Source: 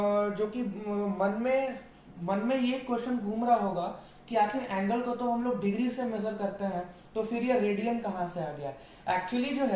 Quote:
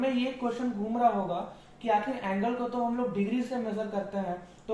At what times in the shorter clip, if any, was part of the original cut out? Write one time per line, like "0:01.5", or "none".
none